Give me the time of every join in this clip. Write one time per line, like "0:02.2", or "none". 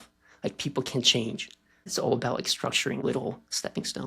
0:01.9
0:03.0